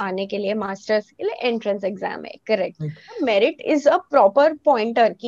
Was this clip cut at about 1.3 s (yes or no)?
no